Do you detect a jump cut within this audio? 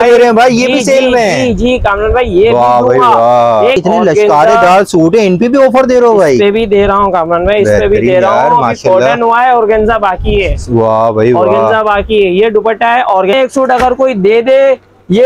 yes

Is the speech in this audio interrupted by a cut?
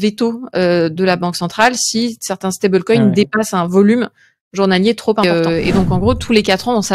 yes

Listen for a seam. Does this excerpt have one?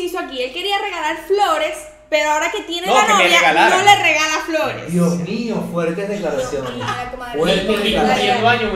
no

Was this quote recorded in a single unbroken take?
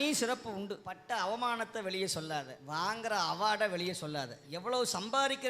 no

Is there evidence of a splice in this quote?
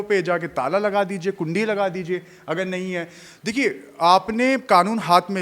no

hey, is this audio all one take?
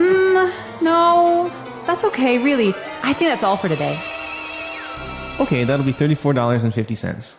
no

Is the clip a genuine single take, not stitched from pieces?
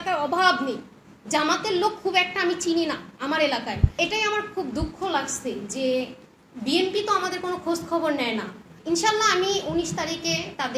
no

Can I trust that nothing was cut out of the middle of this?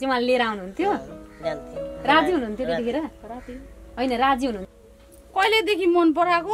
no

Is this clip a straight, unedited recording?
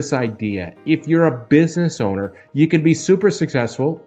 yes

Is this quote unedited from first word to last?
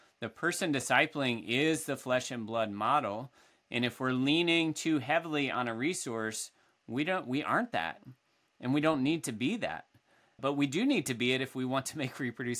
no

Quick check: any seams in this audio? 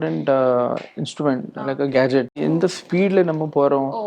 yes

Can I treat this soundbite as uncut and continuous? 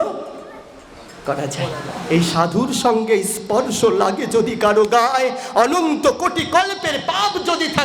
no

